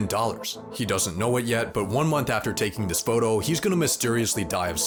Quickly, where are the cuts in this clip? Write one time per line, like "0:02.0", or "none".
none